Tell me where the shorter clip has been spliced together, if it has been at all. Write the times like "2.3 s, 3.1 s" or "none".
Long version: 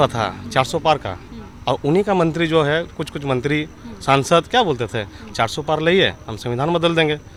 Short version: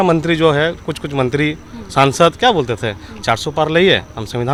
none

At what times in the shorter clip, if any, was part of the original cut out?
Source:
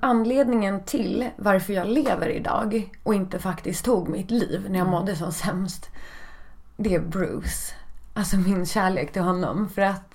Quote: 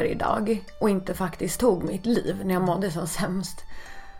none

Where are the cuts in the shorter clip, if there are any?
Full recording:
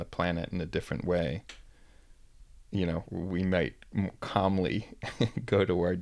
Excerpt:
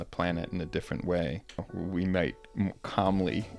1.7 s

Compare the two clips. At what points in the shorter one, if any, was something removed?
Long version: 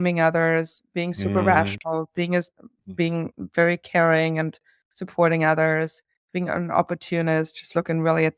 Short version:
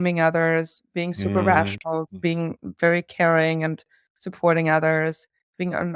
2.1 s

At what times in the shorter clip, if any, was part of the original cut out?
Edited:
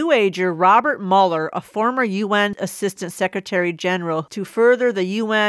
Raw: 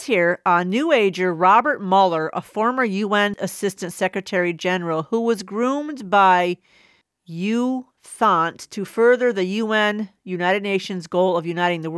4.2 s

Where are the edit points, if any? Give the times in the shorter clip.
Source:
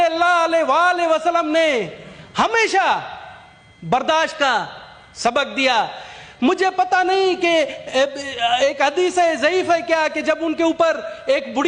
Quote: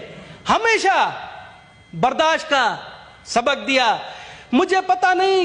none

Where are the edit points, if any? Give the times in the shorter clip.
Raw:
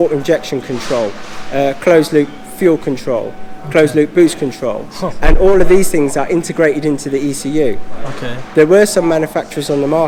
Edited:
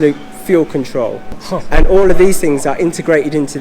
1.4 s

